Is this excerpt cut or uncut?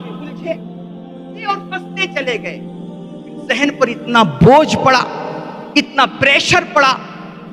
uncut